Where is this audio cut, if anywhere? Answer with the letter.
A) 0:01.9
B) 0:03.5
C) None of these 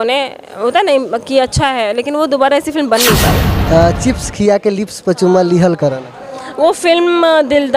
B